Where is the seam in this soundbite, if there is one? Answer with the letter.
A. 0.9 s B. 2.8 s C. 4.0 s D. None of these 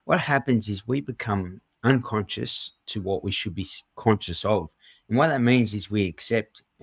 D